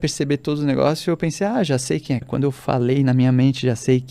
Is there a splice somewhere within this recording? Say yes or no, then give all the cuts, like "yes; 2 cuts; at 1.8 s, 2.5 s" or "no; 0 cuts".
yes; 1 cut; at 2.2 s